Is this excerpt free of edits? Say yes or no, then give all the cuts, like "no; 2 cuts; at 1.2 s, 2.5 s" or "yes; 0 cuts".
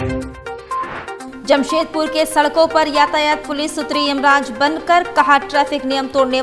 no; 1 cut; at 1.3 s